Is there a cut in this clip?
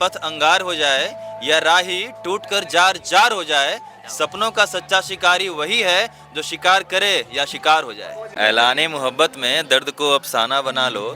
yes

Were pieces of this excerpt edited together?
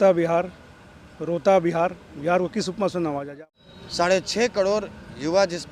yes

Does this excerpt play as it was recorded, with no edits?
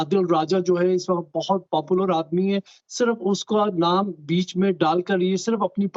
yes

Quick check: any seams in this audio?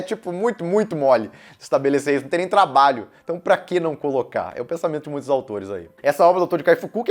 no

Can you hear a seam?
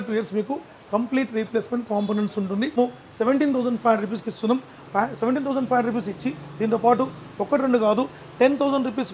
yes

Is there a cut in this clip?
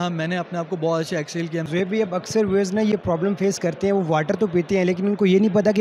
yes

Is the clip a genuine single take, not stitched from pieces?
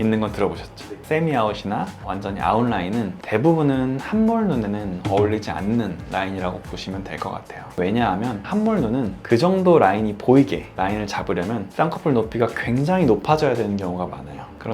no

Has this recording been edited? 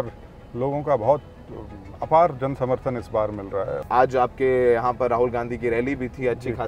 yes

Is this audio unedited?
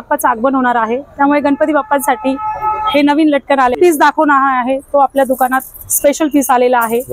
no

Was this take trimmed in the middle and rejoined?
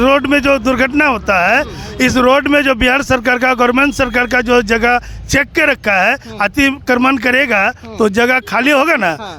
no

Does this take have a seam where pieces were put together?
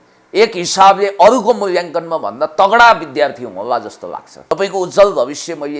yes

